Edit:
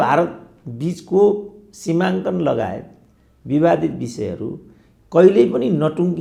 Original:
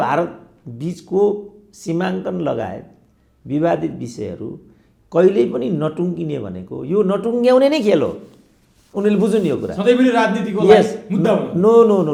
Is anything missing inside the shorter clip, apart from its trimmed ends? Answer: no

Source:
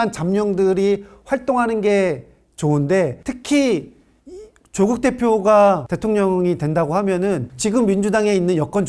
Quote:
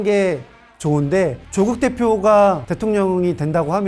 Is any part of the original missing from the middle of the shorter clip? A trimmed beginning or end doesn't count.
yes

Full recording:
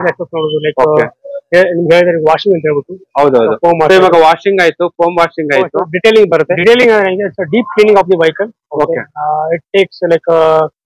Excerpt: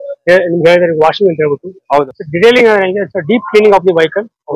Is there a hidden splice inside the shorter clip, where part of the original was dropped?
yes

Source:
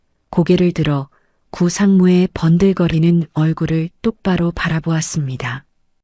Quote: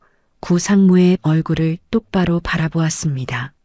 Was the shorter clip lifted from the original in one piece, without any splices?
no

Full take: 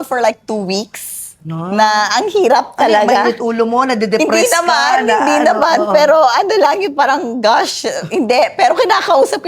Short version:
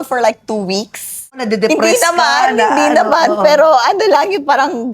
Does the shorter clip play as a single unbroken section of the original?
no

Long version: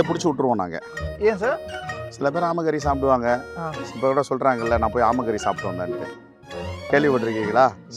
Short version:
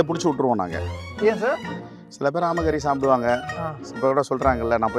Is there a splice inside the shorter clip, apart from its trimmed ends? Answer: no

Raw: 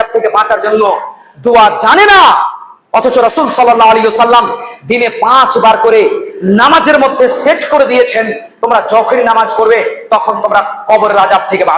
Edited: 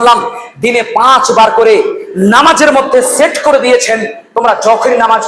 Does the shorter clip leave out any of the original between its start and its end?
no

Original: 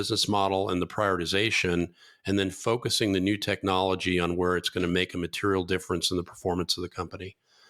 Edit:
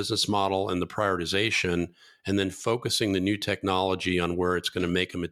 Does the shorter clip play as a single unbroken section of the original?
yes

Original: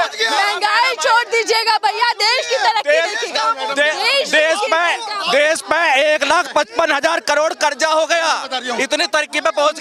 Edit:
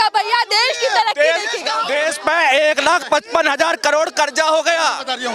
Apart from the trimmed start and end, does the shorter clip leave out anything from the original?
yes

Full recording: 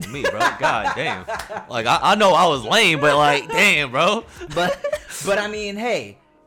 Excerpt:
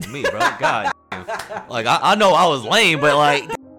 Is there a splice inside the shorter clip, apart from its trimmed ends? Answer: no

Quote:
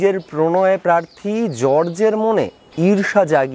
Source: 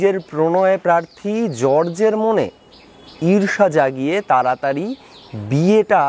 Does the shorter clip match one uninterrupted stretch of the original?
no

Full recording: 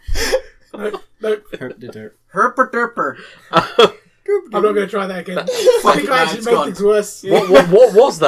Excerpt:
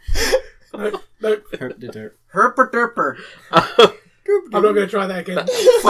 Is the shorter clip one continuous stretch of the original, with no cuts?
yes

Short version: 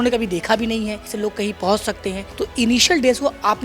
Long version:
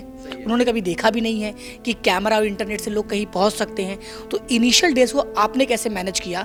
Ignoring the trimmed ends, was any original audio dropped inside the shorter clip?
yes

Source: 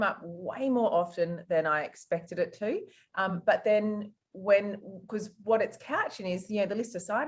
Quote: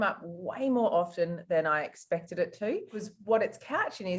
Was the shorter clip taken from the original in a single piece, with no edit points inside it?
no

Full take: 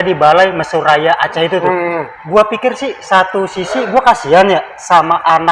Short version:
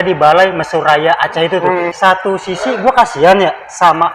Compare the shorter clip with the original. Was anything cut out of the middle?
yes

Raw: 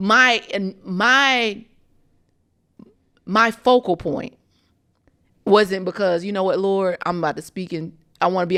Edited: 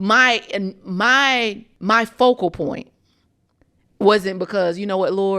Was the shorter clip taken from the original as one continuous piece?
no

